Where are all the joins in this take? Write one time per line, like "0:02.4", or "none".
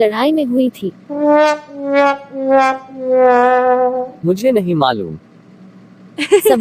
none